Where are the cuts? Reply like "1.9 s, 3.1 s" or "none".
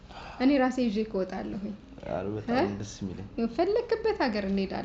none